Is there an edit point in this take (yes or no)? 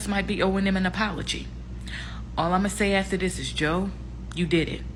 no